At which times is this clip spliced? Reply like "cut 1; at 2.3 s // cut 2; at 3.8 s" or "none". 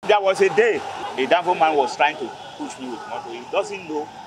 cut 1; at 1.0 s